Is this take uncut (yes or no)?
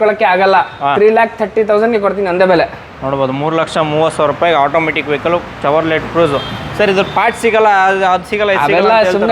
yes